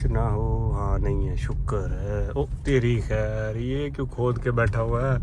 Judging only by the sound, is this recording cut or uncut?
uncut